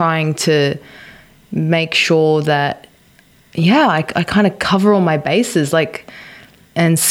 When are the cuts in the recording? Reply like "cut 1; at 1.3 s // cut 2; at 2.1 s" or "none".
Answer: none